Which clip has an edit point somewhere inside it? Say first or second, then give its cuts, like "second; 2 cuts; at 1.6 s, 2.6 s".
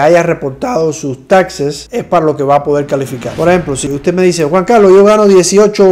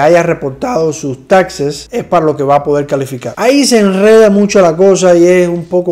first; 1 cut; at 3.3 s